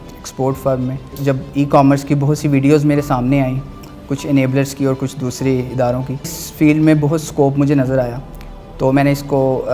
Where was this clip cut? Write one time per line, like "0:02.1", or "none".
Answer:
0:01.1
0:06.4